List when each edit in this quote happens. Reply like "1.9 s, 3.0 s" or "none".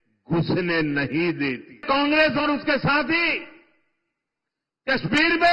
1.8 s